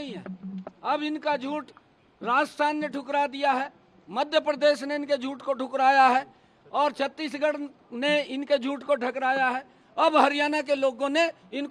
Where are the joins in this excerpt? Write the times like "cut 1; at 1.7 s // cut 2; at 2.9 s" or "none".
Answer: none